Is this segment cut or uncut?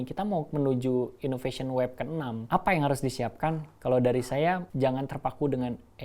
cut